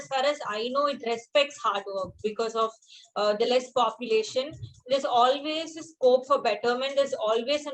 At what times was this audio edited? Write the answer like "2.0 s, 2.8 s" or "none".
none